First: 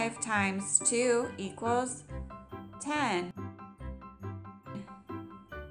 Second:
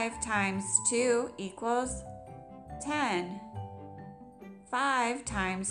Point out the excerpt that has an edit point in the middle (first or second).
first